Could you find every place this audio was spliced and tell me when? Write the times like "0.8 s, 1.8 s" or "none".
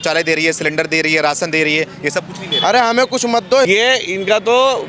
3.7 s